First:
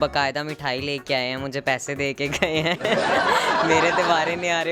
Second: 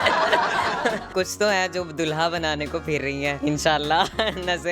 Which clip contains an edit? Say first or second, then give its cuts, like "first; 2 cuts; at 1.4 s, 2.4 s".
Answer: second; 2 cuts; at 1.1 s, 3.4 s